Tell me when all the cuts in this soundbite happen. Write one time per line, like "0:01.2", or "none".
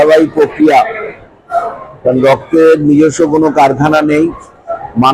none